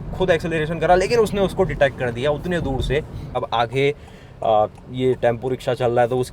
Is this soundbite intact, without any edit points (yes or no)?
no